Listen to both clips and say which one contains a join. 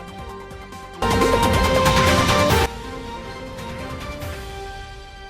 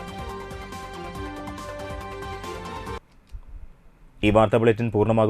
first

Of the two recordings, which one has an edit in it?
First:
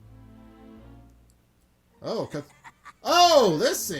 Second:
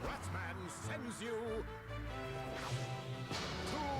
first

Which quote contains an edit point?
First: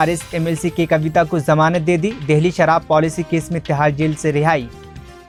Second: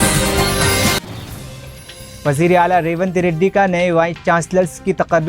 second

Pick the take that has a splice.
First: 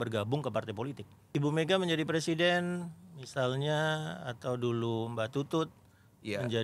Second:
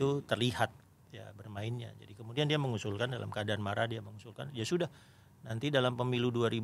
first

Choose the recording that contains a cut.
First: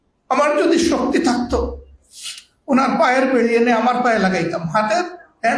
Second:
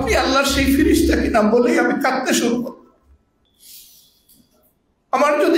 second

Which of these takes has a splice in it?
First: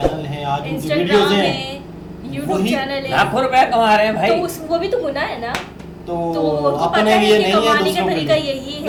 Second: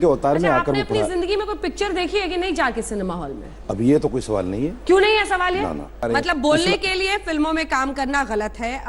second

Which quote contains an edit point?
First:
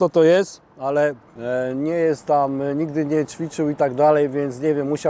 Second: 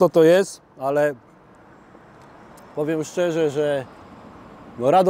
first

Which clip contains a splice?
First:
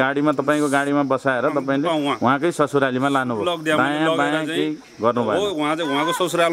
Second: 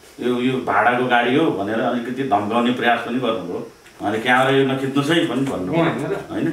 second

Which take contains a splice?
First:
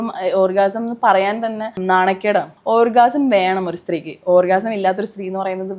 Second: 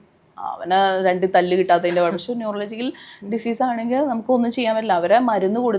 first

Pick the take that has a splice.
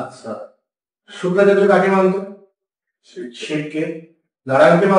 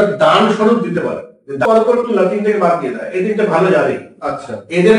second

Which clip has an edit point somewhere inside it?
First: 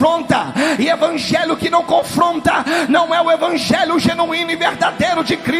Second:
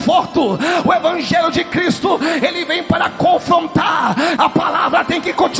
second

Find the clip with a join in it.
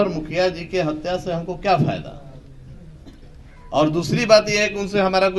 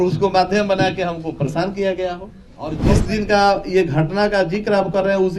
second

